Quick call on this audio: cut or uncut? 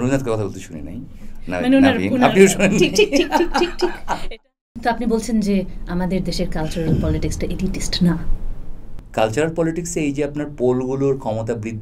cut